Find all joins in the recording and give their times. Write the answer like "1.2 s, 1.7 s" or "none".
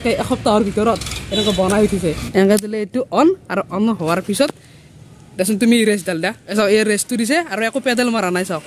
2.2 s, 6.4 s